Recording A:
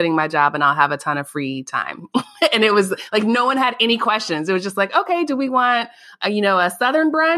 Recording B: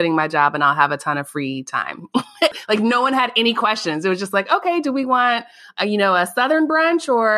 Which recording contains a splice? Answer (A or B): B